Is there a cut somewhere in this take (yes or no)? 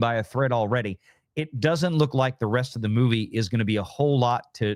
no